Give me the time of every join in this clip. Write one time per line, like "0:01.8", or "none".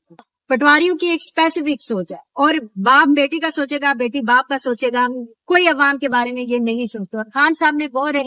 none